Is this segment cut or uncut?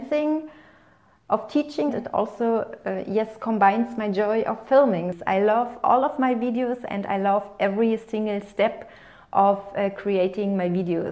cut